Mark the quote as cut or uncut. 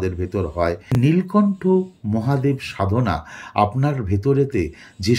cut